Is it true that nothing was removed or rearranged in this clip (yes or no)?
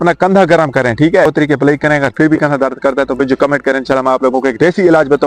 no